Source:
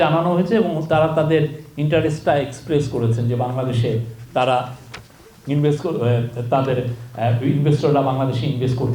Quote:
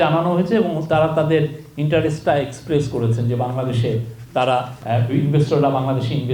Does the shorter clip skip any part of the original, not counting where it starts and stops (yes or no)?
yes